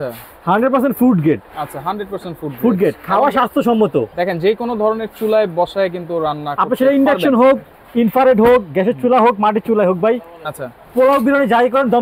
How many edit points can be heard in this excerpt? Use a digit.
0